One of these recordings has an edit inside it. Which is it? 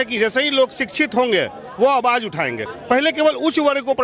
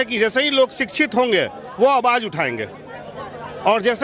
first; 1 cut; at 2.7 s

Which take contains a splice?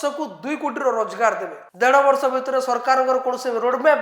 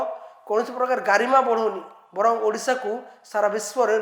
first; 1 cut; at 1.6 s

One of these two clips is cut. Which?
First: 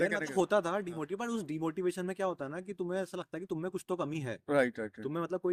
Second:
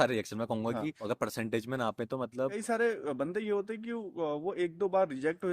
second; 2 cuts; at 1.0 s, 2.6 s

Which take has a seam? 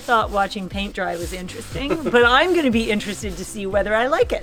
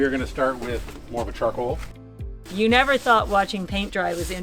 second; 2 cuts; at 0.9 s, 2.0 s

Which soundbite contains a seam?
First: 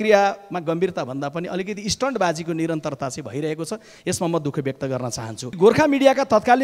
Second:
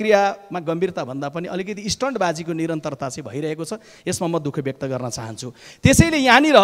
first; 1 cut; at 5.6 s

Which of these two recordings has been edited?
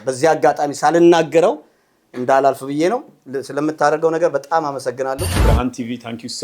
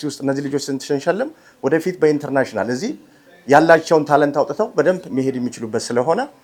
first; 1 cut; at 5.4 s

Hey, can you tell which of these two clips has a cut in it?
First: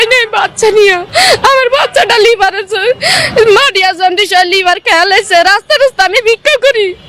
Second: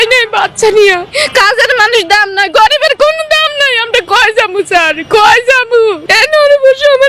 second; 2 cuts; at 1.1 s, 6.1 s

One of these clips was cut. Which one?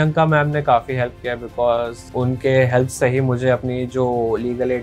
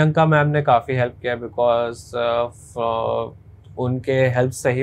first; 1 cut; at 2.0 s

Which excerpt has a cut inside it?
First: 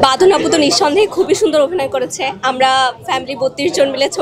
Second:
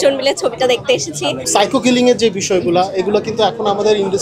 second; 1 cut; at 1.4 s

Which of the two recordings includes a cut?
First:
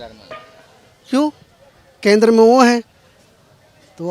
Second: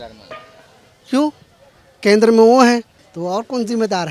second; 1 cut; at 3.0 s

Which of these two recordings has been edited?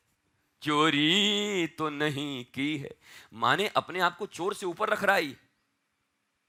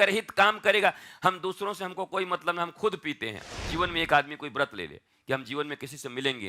second; 1 cut; at 3.3 s

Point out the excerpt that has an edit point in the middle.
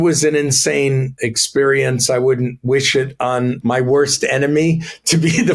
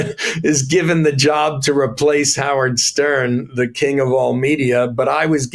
first; 2 cuts; at 1.2 s, 3.6 s

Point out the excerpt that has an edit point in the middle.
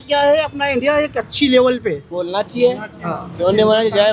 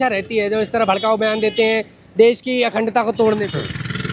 first; 1 cut; at 2.1 s

